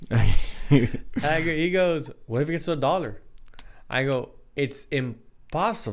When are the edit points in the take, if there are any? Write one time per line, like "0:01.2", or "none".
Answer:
none